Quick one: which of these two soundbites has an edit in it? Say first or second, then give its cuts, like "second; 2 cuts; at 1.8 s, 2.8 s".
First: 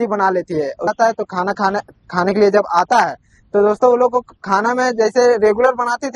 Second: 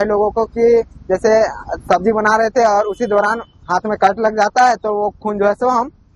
first; 1 cut; at 0.9 s